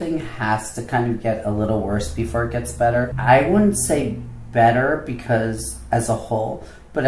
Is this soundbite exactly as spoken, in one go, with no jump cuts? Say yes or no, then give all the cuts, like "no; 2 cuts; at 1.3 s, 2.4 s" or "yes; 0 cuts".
no; 1 cut; at 3.1 s